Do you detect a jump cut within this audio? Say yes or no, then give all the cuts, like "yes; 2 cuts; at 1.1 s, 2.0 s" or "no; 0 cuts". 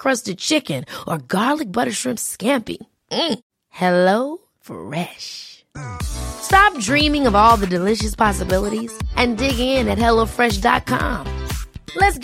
no; 0 cuts